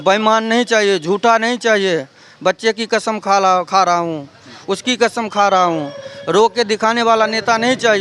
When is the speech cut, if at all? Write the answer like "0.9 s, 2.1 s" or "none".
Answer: none